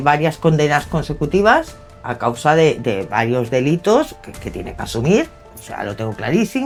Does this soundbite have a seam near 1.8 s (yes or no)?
no